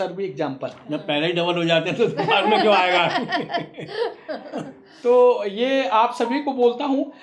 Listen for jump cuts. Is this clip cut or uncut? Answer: uncut